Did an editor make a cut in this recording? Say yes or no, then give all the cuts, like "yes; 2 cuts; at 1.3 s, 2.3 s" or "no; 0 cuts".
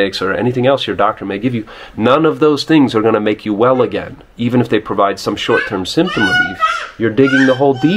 no; 0 cuts